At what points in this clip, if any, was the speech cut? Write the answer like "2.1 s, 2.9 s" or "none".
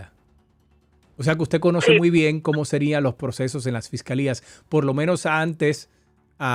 none